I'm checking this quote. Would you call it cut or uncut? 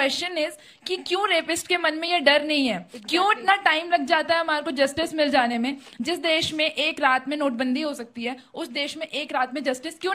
uncut